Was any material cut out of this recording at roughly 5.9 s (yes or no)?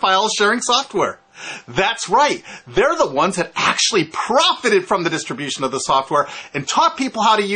yes